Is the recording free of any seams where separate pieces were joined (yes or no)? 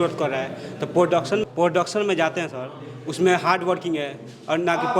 no